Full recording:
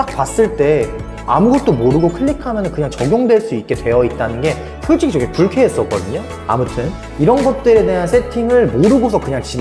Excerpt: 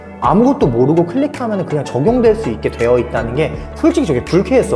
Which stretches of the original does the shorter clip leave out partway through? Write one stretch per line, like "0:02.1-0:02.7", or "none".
none

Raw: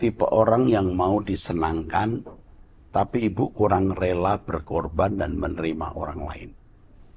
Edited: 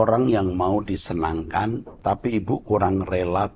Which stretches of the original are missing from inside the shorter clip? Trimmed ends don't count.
0:02.3-0:02.8

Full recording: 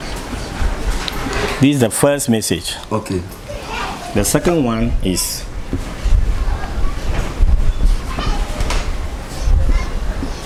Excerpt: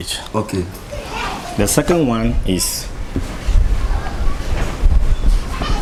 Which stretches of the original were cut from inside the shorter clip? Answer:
none

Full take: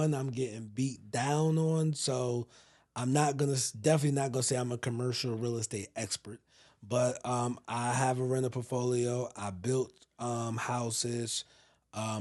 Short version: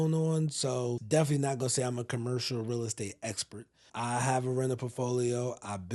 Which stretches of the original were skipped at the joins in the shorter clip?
0:02.4-0:03.7
0:06.6-0:07.6

